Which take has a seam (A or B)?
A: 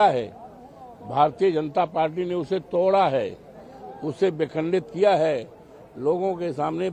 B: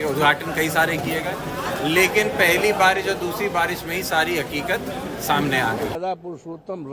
B